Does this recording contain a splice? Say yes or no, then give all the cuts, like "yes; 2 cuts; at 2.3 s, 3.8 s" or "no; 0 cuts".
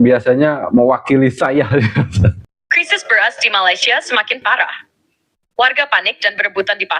yes; 1 cut; at 2.5 s